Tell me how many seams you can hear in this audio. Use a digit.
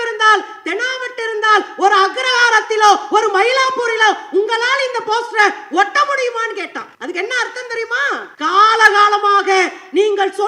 2